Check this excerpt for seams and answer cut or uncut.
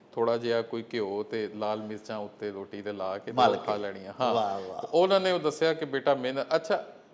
uncut